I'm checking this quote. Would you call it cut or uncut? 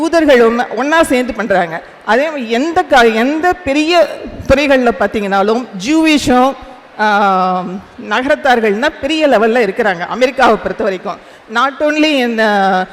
uncut